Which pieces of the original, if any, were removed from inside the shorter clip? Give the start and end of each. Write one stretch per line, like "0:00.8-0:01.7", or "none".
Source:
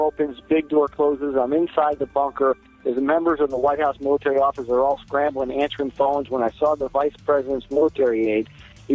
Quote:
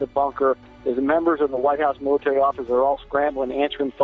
none